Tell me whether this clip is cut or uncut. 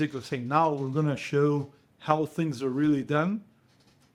uncut